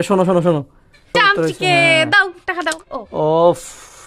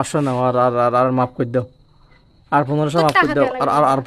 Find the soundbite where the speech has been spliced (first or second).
first